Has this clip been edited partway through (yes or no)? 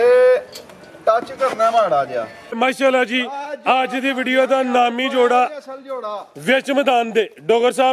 yes